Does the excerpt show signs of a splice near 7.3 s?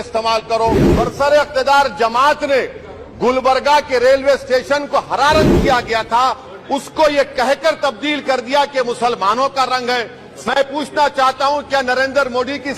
no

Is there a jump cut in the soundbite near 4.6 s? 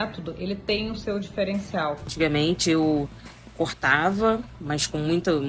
no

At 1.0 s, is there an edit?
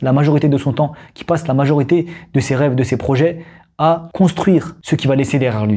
no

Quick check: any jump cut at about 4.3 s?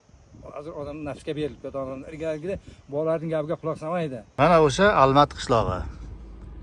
yes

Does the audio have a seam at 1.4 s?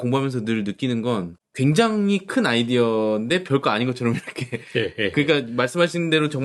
yes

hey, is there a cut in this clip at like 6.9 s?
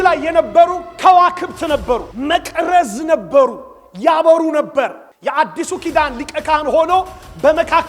no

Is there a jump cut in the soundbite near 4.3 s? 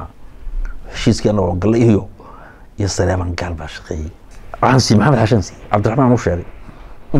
yes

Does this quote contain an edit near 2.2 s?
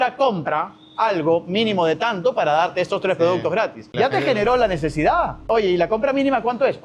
no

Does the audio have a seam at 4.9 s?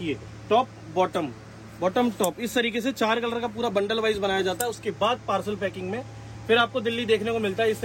no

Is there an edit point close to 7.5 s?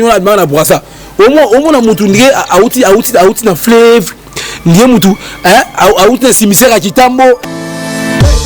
yes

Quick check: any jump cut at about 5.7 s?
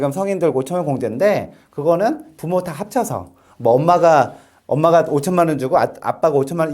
no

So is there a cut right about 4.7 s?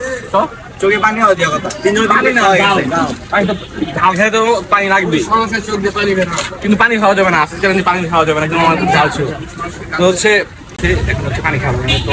no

